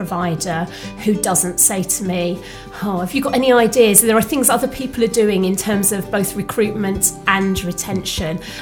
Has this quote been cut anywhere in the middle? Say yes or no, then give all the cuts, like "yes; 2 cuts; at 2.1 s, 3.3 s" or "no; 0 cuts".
no; 0 cuts